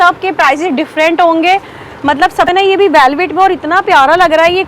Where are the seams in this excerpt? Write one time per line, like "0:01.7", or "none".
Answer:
0:02.5